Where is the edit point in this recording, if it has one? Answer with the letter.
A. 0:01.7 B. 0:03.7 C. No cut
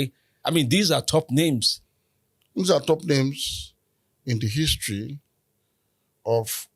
C